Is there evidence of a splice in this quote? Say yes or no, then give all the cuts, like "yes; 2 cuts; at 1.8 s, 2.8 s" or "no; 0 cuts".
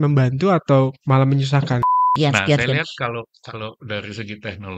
yes; 1 cut; at 1.9 s